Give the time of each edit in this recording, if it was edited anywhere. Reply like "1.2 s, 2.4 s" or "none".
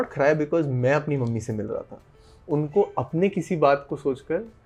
none